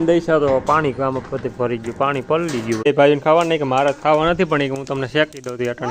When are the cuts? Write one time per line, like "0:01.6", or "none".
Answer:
0:02.9